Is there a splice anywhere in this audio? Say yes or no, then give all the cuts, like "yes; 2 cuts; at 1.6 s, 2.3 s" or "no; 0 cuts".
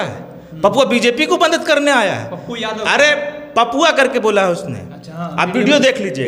no; 0 cuts